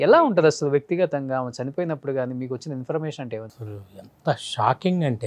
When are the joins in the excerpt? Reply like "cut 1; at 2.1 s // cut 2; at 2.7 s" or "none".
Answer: cut 1; at 3.5 s